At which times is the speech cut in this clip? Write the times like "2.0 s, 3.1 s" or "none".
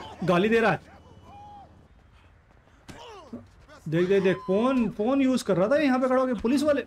1.8 s